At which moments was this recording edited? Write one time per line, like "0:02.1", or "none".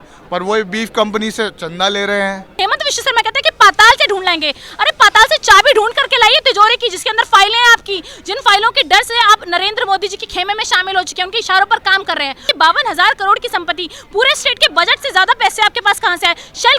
0:02.6
0:12.4